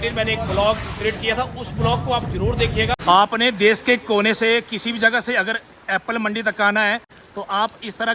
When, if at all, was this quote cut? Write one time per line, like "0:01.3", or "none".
0:03.0
0:07.2

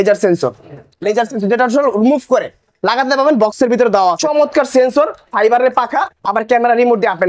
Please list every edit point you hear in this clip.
0:04.2

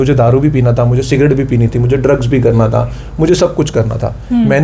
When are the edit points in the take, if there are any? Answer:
none

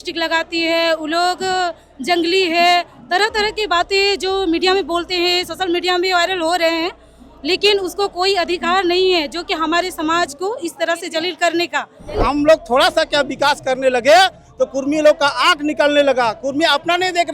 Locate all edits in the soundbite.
0:12.2

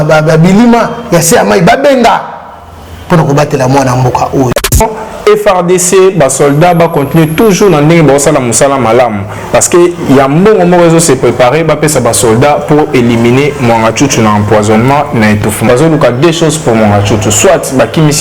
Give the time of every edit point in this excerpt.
0:04.8
0:15.6

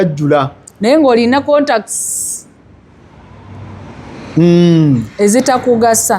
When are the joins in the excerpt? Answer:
none

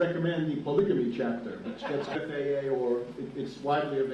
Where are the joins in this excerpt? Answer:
none

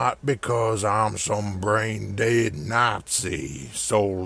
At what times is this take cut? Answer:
0:02.6

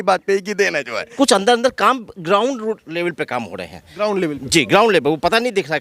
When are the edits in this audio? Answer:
0:01.1

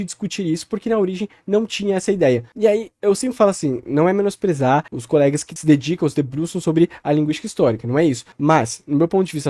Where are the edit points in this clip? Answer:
0:05.1
0:08.3

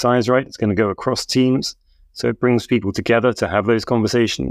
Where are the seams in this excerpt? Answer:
none

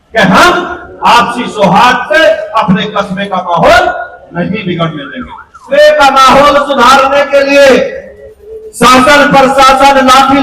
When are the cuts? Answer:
0:05.7

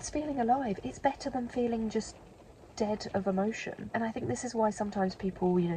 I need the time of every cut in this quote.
none

